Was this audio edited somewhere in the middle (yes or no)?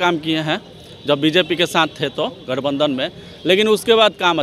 no